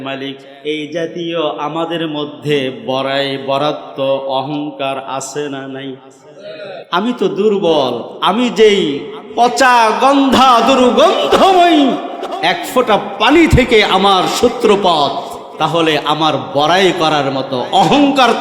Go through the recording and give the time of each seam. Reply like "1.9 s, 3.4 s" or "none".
6.9 s, 15.4 s